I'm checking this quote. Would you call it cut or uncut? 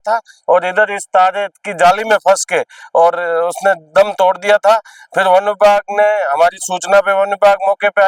uncut